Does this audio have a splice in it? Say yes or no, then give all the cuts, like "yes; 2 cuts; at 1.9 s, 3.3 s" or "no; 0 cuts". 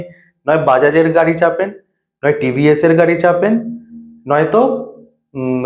no; 0 cuts